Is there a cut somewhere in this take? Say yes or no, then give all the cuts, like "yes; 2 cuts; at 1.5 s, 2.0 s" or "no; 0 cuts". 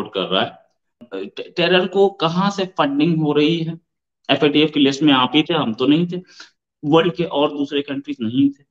yes; 1 cut; at 1.0 s